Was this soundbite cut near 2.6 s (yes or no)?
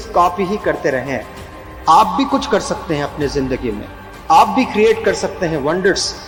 no